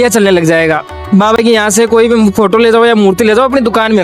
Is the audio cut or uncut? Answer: uncut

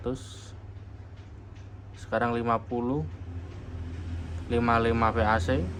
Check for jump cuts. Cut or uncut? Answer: uncut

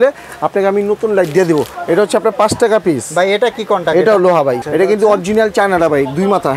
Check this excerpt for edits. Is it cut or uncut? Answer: cut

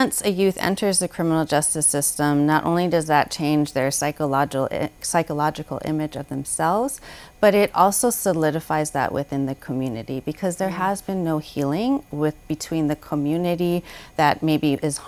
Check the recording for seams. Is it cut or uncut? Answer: uncut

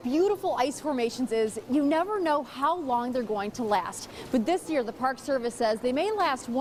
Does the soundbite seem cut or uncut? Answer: uncut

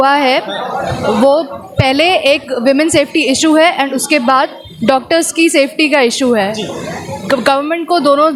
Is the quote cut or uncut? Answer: uncut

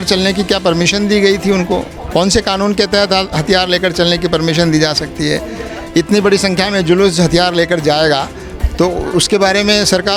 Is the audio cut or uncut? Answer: uncut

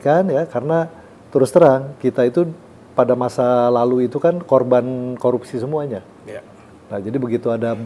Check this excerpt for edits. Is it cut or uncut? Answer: uncut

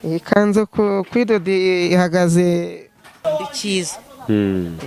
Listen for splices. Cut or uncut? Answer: cut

